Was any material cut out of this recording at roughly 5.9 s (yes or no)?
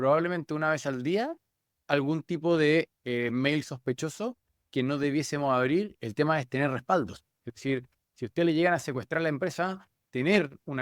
yes